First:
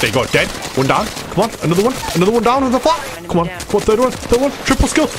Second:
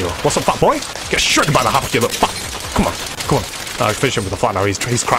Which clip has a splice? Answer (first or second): first